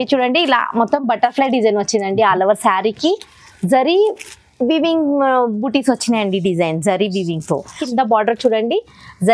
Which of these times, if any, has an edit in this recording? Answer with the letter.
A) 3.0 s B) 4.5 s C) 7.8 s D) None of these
C